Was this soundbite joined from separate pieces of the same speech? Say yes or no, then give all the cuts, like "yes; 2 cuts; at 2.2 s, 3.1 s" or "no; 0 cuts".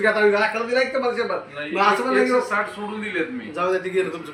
no; 0 cuts